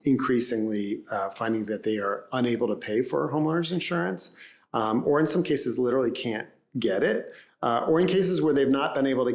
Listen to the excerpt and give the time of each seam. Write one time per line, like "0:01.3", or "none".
none